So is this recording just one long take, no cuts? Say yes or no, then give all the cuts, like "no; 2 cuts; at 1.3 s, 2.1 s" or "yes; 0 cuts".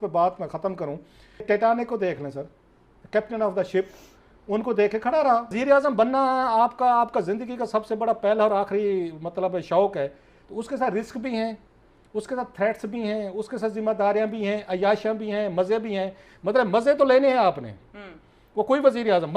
no; 2 cuts; at 1.4 s, 5.6 s